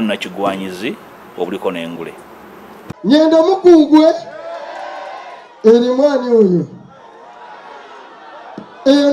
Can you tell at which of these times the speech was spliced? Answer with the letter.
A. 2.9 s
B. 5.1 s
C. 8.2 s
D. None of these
A